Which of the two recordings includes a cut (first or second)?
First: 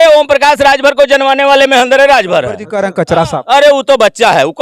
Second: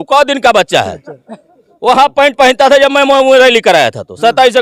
first